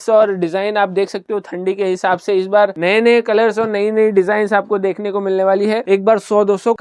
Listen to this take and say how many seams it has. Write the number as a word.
one